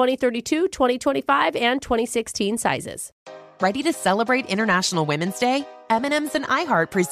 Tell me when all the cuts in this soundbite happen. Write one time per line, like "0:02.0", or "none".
0:03.2